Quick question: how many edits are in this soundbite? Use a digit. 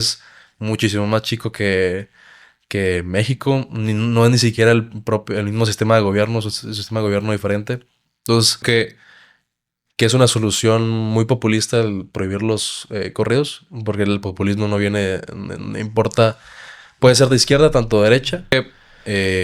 2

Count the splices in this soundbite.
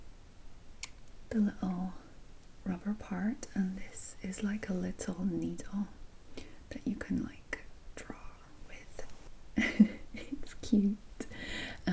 1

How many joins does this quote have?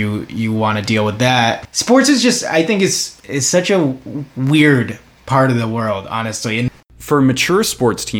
3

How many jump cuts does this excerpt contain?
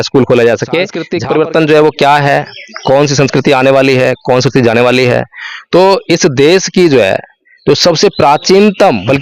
1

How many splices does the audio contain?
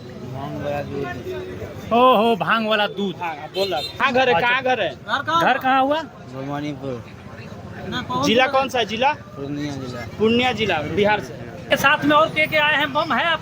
2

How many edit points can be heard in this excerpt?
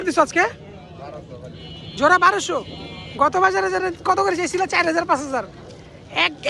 0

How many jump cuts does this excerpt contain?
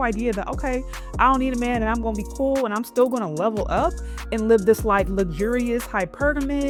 0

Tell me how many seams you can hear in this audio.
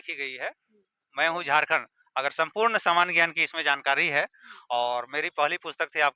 0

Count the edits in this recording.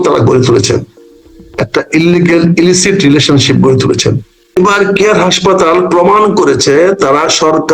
1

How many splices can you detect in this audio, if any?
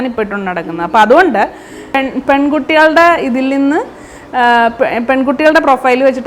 1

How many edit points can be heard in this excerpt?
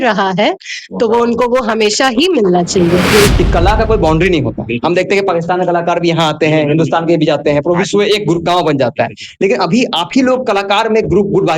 1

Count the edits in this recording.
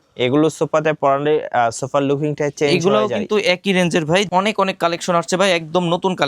1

